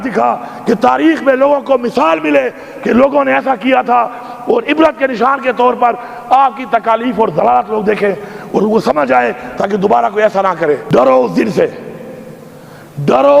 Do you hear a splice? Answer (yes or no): yes